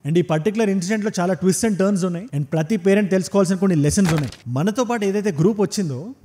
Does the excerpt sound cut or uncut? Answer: cut